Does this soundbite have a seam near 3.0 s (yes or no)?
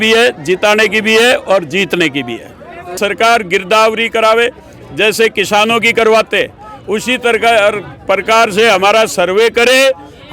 yes